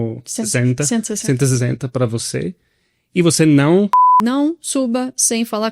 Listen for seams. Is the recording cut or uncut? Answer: cut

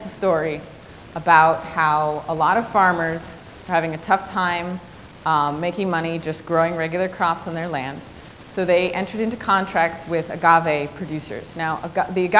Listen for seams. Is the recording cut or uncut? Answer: cut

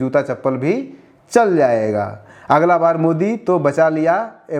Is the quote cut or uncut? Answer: uncut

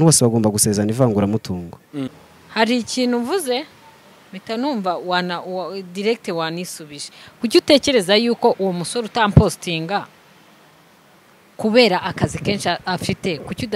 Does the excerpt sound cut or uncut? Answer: cut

